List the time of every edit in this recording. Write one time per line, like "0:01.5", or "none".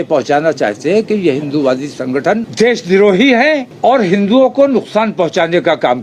0:02.5
0:03.7